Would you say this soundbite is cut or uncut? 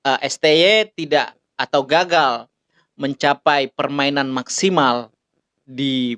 uncut